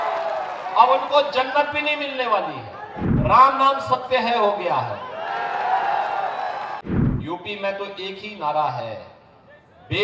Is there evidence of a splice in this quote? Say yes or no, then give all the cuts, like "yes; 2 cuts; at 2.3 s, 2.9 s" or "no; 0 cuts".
yes; 2 cuts; at 3.0 s, 6.8 s